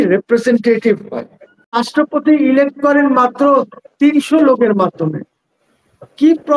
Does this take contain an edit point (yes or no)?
yes